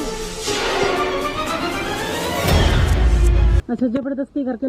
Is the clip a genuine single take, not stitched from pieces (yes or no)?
yes